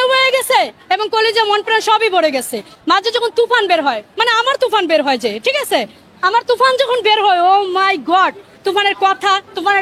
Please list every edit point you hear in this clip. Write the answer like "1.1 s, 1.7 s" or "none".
2.7 s